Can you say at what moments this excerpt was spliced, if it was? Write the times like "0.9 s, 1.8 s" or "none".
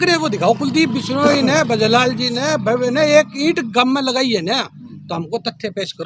none